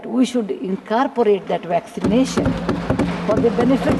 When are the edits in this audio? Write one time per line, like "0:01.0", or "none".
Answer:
none